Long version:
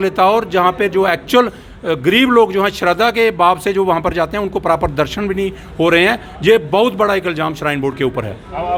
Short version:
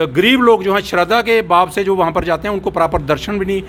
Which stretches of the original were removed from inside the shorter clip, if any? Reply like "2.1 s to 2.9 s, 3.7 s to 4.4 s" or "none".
none